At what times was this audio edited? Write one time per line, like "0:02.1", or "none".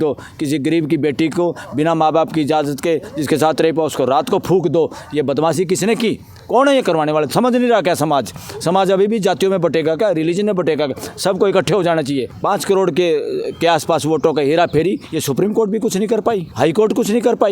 0:12.3
0:16.5